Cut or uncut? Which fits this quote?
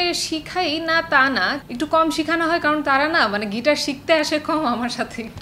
cut